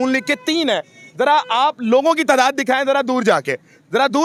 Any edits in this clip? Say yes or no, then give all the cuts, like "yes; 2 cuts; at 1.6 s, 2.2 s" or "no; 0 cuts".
no; 0 cuts